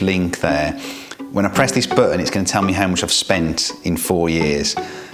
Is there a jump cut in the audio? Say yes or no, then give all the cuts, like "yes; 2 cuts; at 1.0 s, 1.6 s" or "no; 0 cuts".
no; 0 cuts